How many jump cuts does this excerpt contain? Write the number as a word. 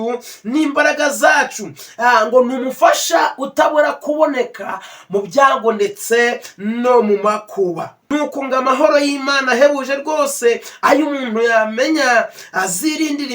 one